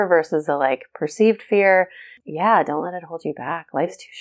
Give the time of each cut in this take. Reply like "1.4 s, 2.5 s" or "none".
none